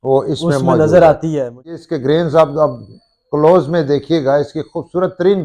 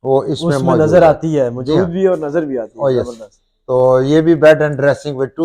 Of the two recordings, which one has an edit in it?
first; 1 cut; at 1.6 s

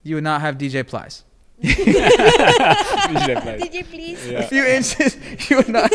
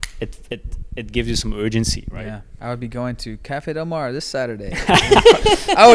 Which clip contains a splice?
second; 1 cut; at 2.5 s

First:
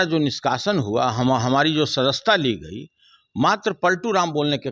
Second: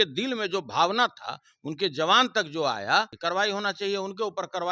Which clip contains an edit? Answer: second; 1 cut; at 3.1 s

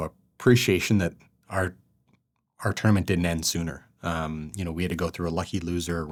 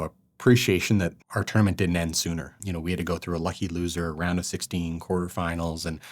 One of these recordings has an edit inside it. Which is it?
second; 2 cuts; at 1.2 s, 2.6 s

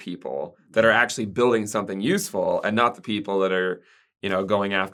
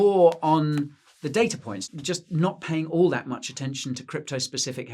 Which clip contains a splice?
second; 1 cut; at 1.7 s

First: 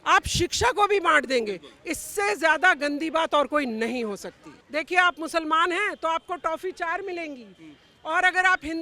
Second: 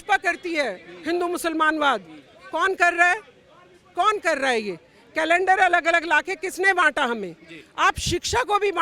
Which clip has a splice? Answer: first; 1 cut; at 4.5 s

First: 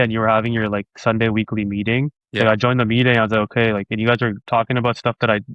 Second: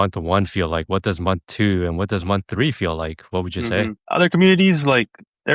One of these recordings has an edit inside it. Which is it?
second; 1 cut; at 4.0 s

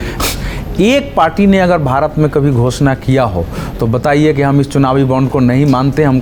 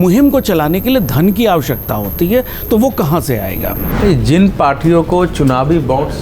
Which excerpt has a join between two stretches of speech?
second; 1 cut; at 3.8 s

